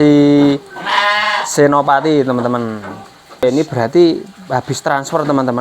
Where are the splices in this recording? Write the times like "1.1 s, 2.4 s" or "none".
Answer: 3.6 s